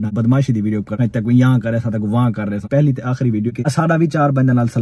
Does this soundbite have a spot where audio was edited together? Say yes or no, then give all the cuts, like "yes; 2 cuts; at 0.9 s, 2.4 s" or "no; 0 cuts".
no; 0 cuts